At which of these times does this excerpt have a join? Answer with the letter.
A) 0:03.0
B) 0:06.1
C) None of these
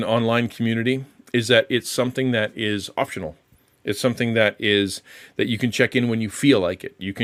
C